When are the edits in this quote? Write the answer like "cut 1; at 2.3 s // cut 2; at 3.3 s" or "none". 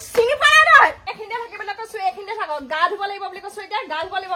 cut 1; at 1.1 s